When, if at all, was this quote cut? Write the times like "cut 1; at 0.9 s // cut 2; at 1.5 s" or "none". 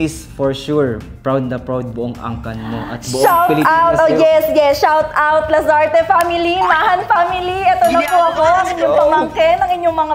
none

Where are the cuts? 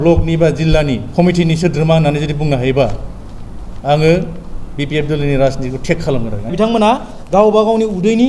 cut 1; at 1.1 s // cut 2; at 6.5 s

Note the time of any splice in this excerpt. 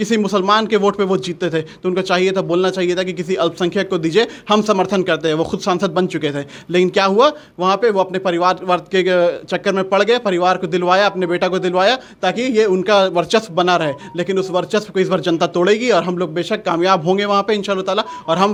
none

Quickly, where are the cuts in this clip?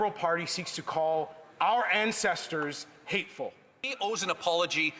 cut 1; at 3.9 s

